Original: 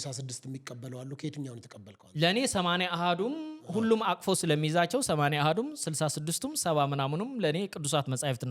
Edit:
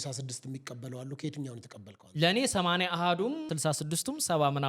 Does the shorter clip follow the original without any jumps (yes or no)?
no